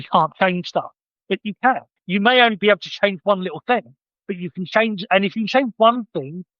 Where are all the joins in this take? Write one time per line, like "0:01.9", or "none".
0:02.0